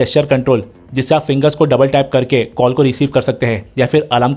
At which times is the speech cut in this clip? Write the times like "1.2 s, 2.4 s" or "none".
none